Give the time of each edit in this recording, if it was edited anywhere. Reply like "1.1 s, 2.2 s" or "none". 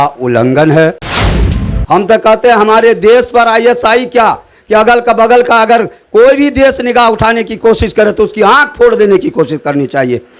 1.5 s